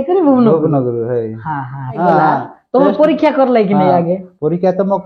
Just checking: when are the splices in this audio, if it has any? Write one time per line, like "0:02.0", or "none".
0:02.0